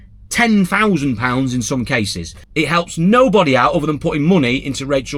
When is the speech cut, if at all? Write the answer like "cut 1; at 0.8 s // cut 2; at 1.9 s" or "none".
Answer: cut 1; at 2.5 s